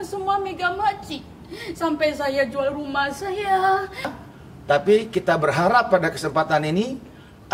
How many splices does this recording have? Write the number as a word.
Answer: one